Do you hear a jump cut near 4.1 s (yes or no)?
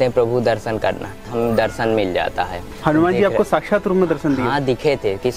no